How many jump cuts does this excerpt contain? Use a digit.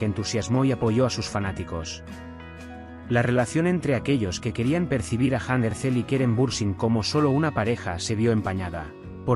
2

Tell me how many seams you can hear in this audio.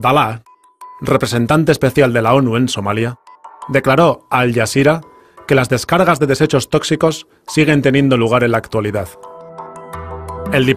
1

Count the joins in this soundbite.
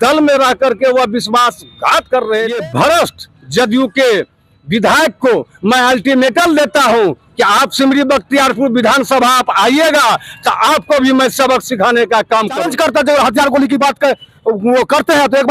2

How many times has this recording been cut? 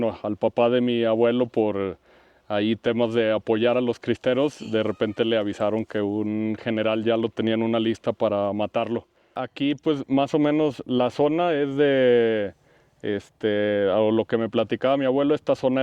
1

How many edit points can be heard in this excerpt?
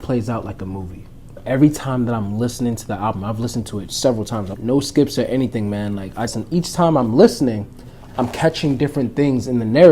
3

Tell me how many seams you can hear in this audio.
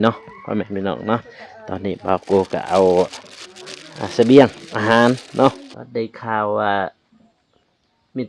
1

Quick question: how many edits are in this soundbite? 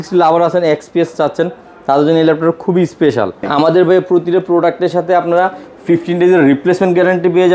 1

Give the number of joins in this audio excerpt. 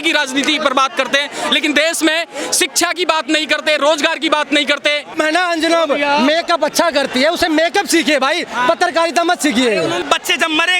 2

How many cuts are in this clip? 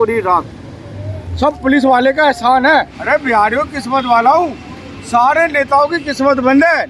1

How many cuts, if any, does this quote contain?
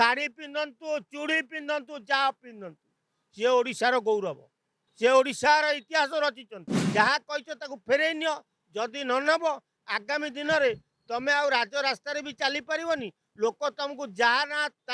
1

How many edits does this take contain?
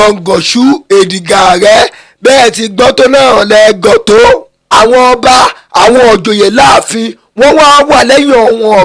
1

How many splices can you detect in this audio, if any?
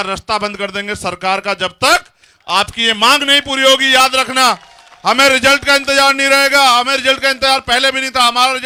0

